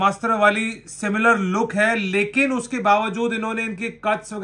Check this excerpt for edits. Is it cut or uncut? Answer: uncut